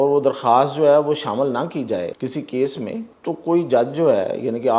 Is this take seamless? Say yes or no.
no